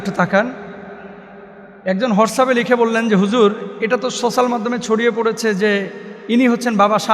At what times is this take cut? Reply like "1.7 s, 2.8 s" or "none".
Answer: none